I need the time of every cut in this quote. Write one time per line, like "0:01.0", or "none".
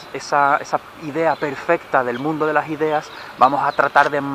none